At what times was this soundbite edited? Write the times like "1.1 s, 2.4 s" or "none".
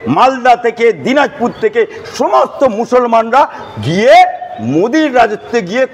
none